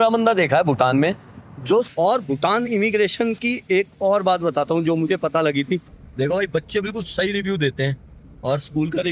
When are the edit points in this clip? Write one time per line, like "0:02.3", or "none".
0:01.9
0:05.9

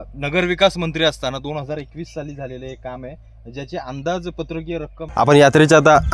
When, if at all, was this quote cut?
0:05.0

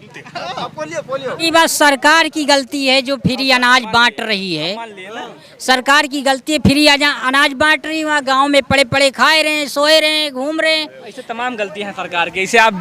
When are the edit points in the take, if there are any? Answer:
0:01.5

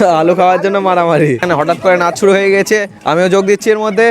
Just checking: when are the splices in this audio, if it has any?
0:01.5

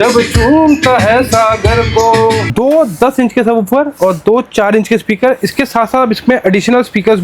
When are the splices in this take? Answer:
0:02.5

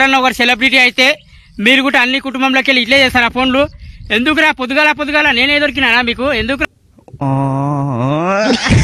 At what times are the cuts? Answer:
none

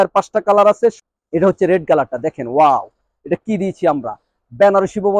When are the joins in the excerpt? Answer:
0:01.1

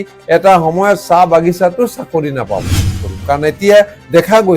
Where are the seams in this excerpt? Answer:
0:03.0

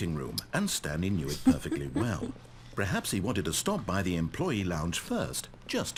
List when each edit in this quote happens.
none

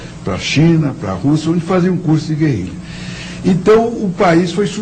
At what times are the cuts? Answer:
0:02.0

